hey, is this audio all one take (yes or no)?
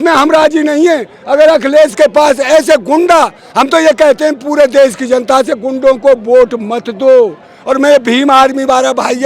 yes